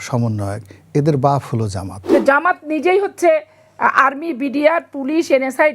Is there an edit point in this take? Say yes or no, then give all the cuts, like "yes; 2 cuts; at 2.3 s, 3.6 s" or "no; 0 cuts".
yes; 1 cut; at 1.9 s